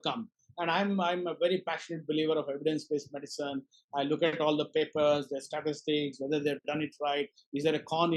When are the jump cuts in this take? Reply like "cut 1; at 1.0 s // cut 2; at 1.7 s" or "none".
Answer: none